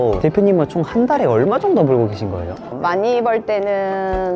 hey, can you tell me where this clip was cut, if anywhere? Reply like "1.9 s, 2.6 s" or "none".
none